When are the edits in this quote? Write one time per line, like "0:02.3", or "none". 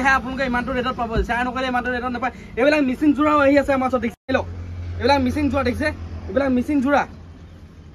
0:04.2